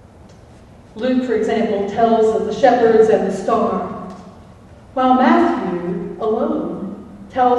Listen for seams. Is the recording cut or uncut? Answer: cut